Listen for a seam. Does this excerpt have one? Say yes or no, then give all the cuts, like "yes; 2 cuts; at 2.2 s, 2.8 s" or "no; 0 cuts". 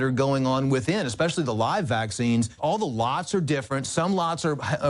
yes; 1 cut; at 2.5 s